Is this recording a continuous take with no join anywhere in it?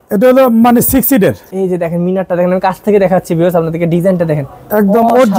no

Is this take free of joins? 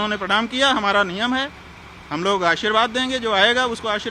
yes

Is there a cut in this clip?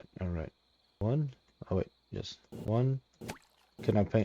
yes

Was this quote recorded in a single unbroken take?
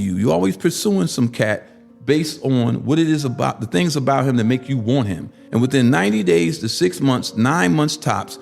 no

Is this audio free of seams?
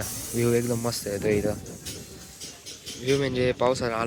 yes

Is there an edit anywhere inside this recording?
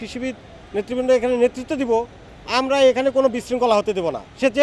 no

